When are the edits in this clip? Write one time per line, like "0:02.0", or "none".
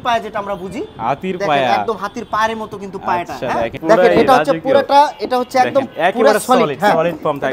0:03.7